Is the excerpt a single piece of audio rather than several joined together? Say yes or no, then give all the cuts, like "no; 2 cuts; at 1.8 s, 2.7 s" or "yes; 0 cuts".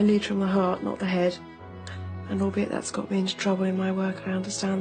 yes; 0 cuts